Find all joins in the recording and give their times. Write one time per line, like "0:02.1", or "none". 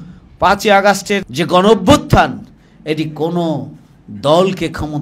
0:01.3